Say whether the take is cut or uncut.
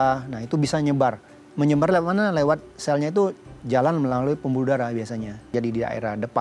cut